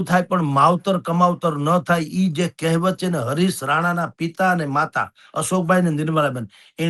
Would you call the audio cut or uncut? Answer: uncut